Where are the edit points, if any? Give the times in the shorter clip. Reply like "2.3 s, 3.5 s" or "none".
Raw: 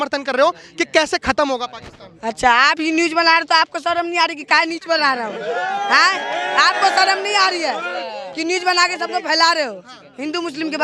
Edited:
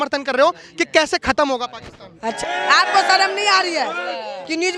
2.4 s